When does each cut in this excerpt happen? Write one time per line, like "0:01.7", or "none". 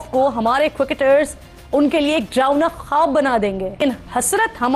0:03.8